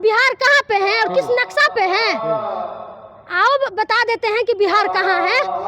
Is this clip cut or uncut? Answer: uncut